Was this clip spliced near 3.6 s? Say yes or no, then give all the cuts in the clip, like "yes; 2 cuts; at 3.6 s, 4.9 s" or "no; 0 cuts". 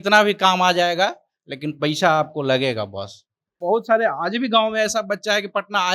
yes; 1 cut; at 3.6 s